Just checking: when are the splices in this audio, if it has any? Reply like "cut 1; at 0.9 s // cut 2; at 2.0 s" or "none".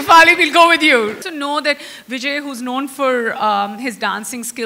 cut 1; at 1.2 s